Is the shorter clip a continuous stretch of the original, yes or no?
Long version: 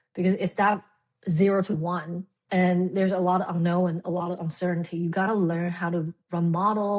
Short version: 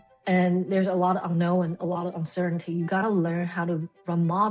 yes